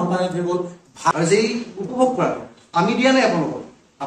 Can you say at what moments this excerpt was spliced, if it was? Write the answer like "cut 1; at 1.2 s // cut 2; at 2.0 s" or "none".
cut 1; at 1.1 s